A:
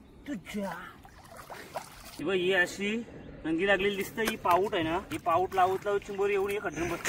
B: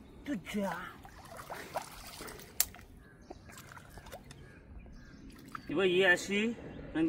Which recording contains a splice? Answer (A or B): A